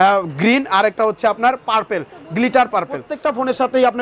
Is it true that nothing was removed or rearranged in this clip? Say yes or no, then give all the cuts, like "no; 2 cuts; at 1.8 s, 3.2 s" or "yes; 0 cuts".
no; 1 cut; at 3.1 s